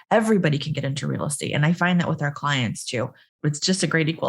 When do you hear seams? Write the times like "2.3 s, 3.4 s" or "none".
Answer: 3.3 s